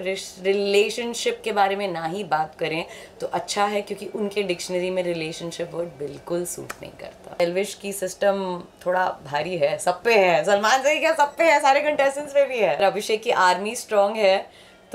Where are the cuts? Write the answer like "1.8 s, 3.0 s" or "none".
7.4 s, 12.8 s

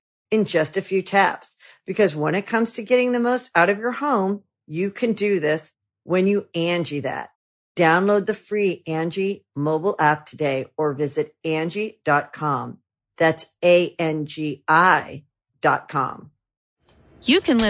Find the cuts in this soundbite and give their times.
16.6 s

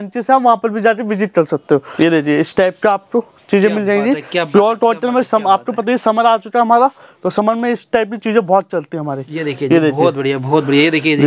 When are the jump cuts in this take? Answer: 1.9 s

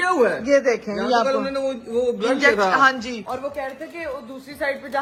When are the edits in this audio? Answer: none

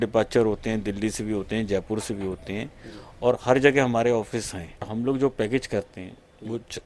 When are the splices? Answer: 4.9 s

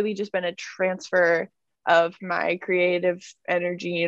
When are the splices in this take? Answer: none

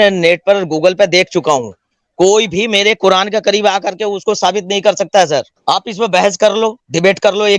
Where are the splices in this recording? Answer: 5.5 s

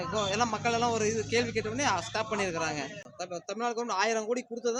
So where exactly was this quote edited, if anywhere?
3.0 s

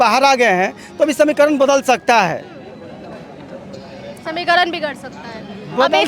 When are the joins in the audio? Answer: none

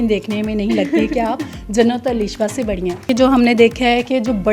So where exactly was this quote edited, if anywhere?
3.1 s

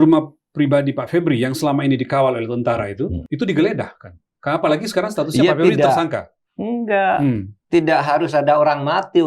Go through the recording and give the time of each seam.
3.2 s

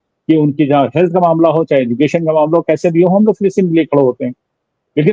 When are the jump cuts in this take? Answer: none

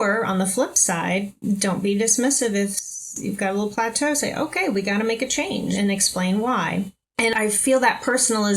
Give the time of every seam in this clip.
5.7 s, 7.3 s

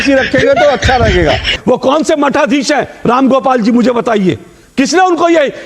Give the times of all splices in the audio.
1.5 s

